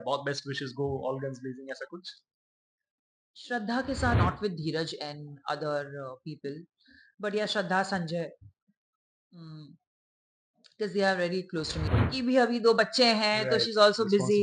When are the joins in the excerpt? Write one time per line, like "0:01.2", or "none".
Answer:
0:04.2
0:11.8

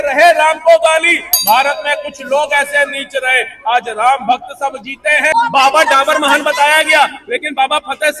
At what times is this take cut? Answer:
0:05.3

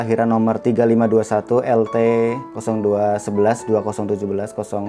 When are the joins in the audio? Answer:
0:02.5

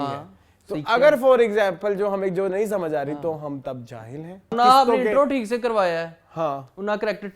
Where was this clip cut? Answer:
0:04.5

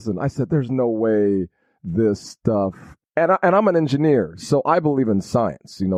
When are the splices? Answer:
none

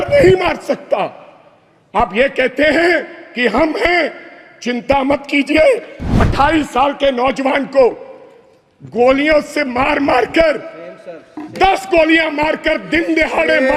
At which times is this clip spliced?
0:06.2

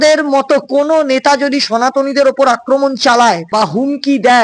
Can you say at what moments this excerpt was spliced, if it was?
0:03.5

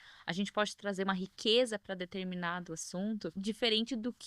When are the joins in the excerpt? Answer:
0:03.4

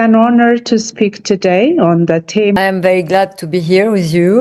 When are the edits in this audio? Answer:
0:02.6

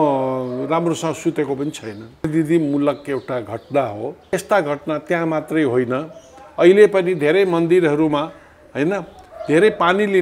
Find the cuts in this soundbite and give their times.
0:02.2
0:04.3

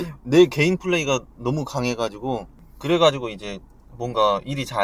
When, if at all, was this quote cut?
none

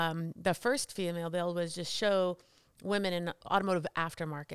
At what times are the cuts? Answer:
0:03.4

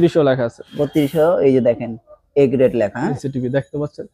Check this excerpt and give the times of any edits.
0:03.2

